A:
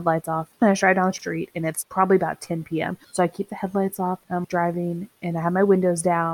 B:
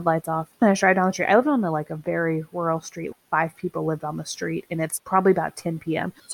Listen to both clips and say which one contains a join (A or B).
A